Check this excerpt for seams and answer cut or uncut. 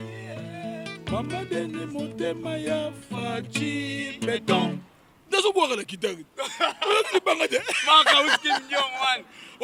uncut